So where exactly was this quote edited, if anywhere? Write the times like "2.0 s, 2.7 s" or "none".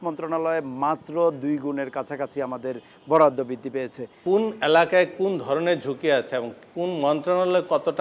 4.1 s